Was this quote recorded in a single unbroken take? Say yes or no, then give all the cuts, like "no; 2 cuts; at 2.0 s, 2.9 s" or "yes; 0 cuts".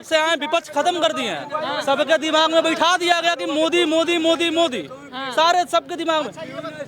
yes; 0 cuts